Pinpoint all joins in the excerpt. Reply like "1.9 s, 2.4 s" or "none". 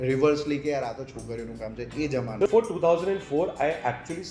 2.5 s

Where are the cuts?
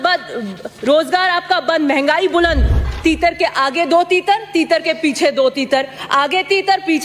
2.9 s

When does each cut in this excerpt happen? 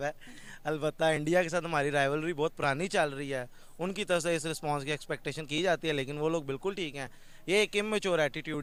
none

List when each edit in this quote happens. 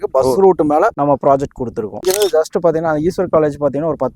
1.9 s

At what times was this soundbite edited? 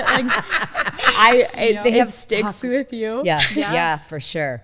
none

